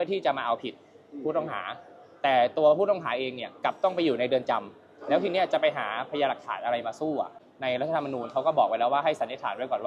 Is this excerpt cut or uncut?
cut